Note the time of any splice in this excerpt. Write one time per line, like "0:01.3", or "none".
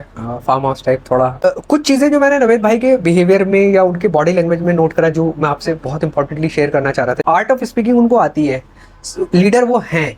0:01.4
0:07.2